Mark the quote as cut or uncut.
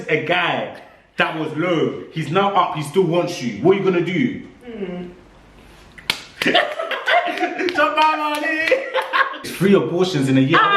cut